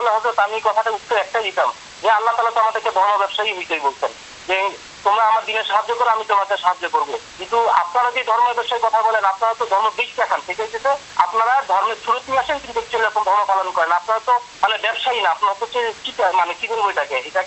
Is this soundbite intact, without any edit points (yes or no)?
yes